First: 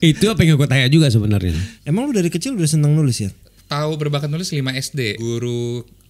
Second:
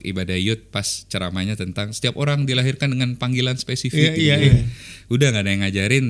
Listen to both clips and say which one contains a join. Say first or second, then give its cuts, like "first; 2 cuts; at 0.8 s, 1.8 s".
first; 3 cuts; at 1.7 s, 3.5 s, 5.2 s